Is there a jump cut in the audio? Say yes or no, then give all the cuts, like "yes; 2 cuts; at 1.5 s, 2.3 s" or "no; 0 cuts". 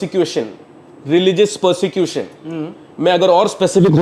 no; 0 cuts